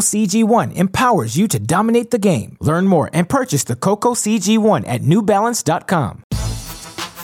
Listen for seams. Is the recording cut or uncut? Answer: cut